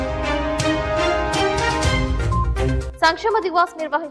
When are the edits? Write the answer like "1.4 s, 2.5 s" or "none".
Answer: none